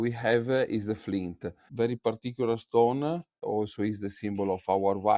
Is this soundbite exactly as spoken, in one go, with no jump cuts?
no; 1 cut; at 1.6 s

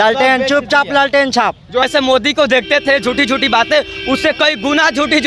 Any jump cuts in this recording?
yes; 1 cut; at 1.8 s

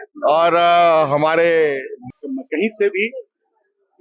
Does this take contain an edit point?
yes; 1 cut; at 1.9 s

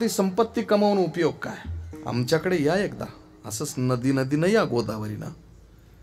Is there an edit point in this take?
yes; 1 cut; at 2.0 s

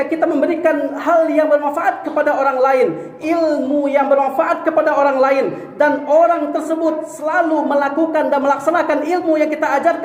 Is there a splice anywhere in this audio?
no; 0 cuts

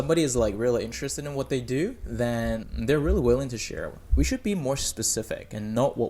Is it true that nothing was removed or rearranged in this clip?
no; 1 cut; at 4.1 s

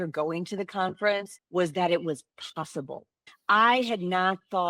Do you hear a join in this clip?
yes; 1 cut; at 1.4 s

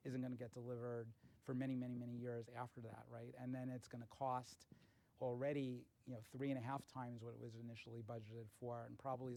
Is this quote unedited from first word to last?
yes; 0 cuts

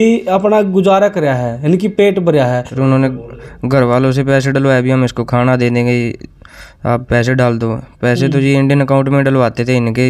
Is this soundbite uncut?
no; 1 cut; at 2.7 s

